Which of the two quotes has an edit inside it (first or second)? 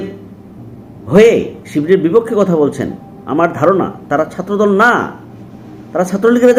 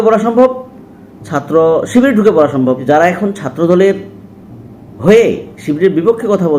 second